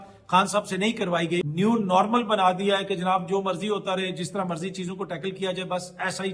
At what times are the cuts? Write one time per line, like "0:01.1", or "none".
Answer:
0:01.4